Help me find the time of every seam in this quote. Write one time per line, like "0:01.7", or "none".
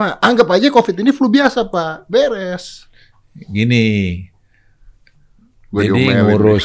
none

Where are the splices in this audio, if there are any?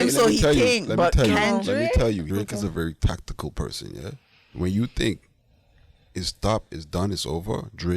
0:02.2
0:04.4

